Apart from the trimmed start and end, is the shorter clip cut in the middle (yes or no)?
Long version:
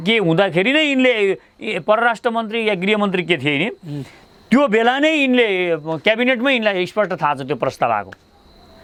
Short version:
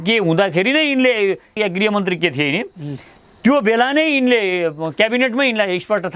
yes